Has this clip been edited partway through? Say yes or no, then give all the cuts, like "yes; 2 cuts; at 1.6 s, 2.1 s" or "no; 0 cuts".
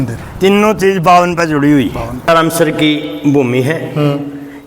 yes; 1 cut; at 2.3 s